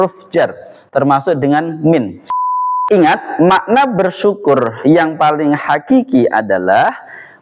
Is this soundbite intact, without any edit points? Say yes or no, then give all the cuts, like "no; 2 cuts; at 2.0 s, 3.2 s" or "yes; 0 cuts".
no; 1 cut; at 2.6 s